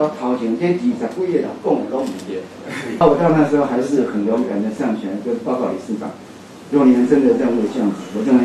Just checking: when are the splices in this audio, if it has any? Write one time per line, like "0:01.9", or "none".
0:03.0